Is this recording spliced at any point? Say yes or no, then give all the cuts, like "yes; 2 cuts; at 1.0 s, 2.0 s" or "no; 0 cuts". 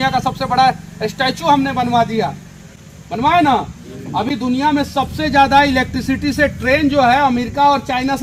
no; 0 cuts